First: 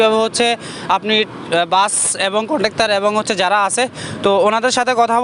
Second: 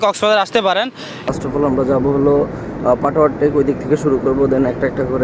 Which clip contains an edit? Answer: second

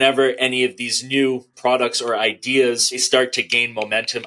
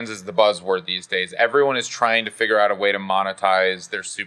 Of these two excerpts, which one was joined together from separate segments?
first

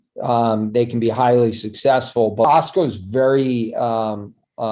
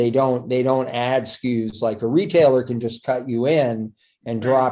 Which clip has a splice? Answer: first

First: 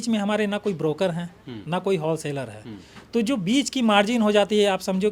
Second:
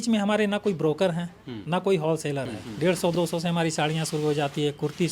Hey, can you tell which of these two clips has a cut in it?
second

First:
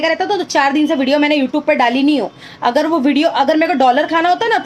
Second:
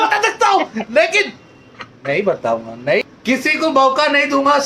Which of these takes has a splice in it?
second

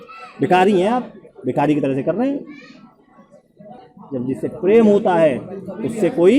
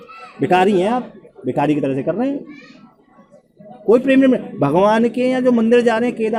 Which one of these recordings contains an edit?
first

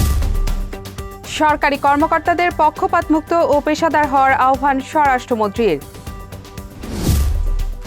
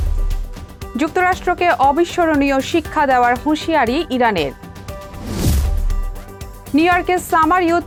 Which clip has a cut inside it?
first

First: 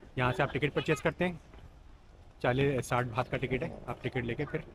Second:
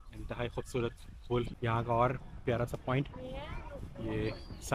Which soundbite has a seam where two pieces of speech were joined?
second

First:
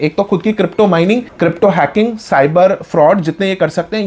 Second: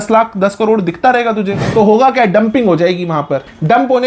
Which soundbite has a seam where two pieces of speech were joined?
second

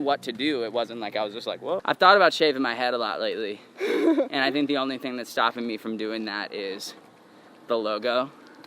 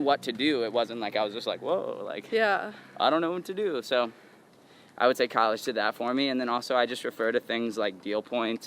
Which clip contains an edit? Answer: first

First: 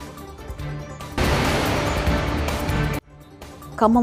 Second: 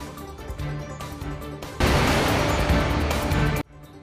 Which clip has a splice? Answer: second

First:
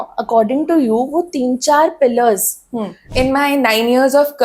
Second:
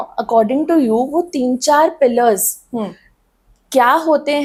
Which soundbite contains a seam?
first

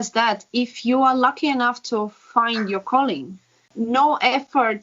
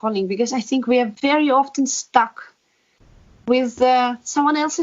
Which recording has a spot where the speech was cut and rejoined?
first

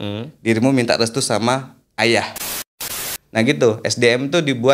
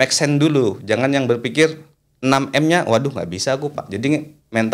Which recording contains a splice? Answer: first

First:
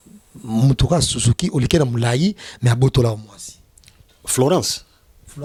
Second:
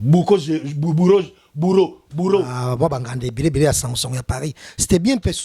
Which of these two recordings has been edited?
second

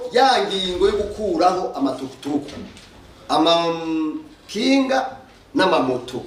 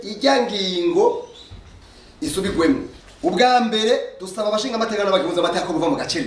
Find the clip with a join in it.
second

